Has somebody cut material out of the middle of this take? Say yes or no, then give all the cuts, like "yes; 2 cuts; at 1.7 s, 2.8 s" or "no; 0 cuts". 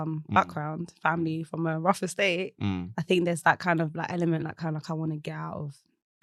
no; 0 cuts